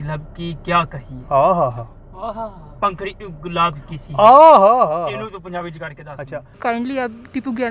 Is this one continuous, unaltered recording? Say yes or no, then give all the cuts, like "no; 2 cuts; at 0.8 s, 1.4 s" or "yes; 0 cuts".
no; 1 cut; at 6.6 s